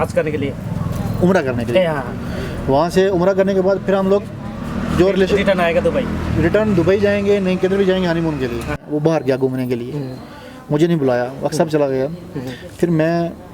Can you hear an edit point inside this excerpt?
yes; 1 cut; at 8.8 s

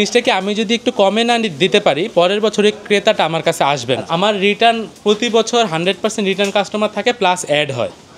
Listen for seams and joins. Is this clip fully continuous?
no; 1 cut; at 4.0 s

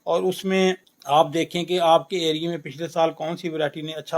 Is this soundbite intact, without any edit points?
no; 1 cut; at 0.9 s

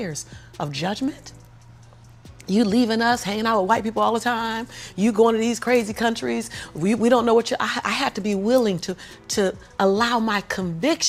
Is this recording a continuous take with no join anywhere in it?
yes; 0 cuts

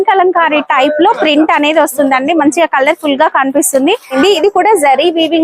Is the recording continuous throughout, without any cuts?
no; 1 cut; at 4.1 s

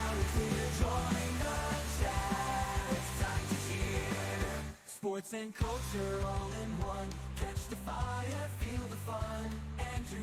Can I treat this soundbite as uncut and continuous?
yes; 0 cuts

